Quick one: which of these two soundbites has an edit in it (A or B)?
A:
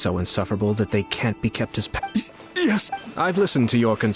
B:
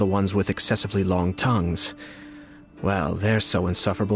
A